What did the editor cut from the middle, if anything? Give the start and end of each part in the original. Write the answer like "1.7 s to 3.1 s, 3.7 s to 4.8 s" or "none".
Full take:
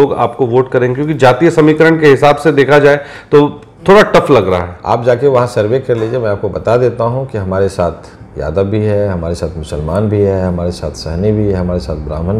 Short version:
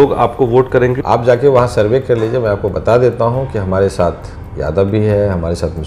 1.0 s to 4.8 s